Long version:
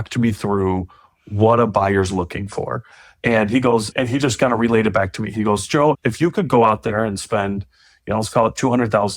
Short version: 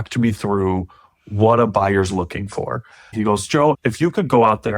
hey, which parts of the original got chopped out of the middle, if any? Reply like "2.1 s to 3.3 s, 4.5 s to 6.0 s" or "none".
3.0 s to 5.2 s